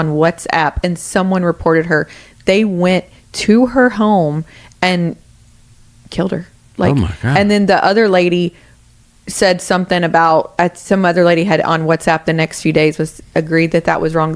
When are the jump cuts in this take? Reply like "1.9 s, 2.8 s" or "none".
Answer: none

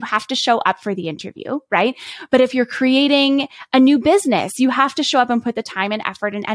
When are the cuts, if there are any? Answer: none

